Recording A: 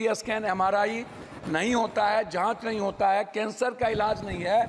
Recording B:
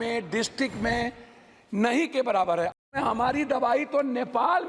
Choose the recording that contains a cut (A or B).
B